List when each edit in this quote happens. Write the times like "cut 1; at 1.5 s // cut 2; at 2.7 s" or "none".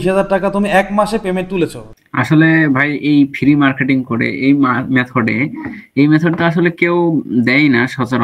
cut 1; at 1.8 s